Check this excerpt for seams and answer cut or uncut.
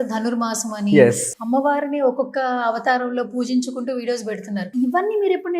cut